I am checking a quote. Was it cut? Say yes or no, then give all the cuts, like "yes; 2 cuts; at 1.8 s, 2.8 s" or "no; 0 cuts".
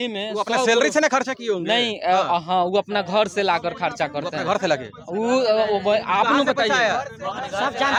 no; 0 cuts